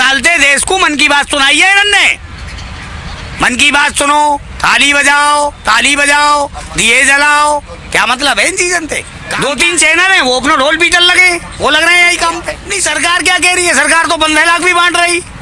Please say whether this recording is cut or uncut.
cut